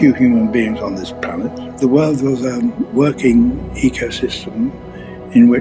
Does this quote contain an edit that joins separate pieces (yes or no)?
yes